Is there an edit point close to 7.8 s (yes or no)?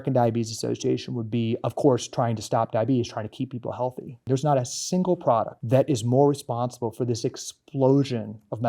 no